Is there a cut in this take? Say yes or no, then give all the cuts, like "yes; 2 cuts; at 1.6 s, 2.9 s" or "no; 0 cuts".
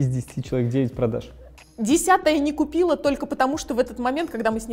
no; 0 cuts